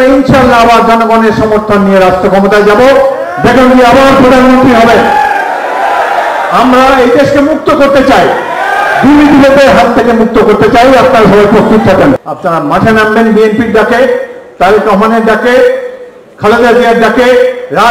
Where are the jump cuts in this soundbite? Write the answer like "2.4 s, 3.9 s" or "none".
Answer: 12.3 s